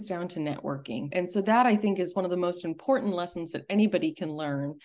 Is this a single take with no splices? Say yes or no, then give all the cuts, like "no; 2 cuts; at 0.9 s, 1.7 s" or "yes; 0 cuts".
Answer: no; 1 cut; at 1.0 s